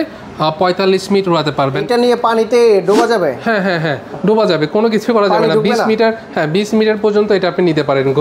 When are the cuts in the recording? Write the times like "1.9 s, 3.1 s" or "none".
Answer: 1.8 s